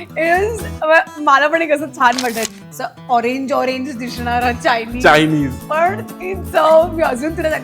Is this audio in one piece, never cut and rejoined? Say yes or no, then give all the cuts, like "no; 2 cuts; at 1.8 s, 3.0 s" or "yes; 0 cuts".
no; 1 cut; at 2.5 s